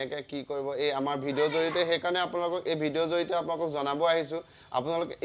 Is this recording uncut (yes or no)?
yes